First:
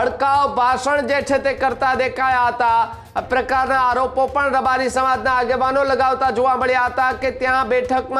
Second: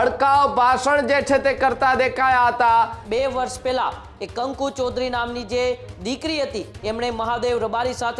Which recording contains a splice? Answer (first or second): second